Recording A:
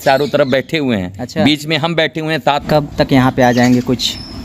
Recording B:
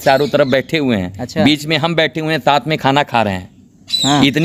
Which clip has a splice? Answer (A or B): A